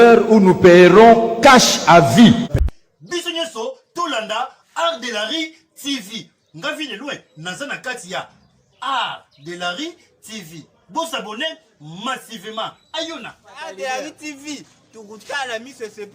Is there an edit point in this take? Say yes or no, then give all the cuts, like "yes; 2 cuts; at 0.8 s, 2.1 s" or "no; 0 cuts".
yes; 1 cut; at 2.6 s